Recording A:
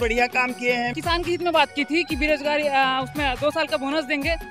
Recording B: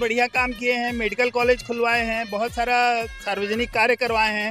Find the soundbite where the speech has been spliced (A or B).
A